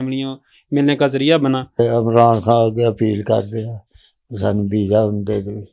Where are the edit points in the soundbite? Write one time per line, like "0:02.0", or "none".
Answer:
0:01.8